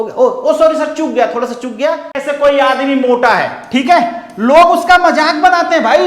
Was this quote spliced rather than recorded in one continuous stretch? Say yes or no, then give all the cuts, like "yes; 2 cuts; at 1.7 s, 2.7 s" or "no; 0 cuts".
yes; 1 cut; at 2.2 s